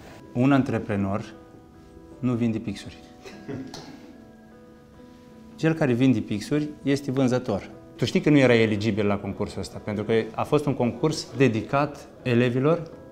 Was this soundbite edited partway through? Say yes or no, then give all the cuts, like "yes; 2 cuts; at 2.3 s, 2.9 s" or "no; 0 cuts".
yes; 3 cuts; at 7.8 s, 11.2 s, 12.1 s